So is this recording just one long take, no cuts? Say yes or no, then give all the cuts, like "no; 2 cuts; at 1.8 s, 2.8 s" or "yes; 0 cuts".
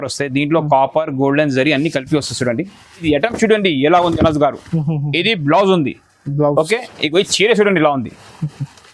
no; 1 cut; at 3.0 s